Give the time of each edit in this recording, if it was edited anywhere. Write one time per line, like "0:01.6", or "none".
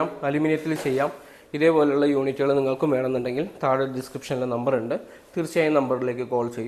none